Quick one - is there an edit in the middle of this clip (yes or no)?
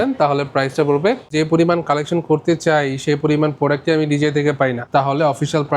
yes